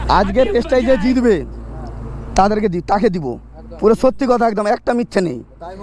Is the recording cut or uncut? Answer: cut